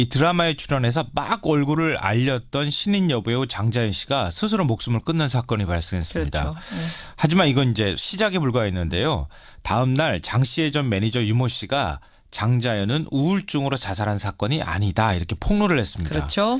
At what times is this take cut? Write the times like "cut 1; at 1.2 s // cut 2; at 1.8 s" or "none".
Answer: cut 1; at 5.9 s